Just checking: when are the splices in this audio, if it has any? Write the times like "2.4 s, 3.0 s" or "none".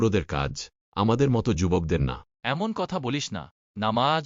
none